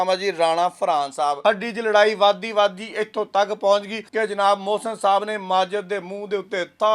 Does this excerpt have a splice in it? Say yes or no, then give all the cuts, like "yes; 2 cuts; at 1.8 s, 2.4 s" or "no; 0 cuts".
yes; 2 cuts; at 1.4 s, 4.0 s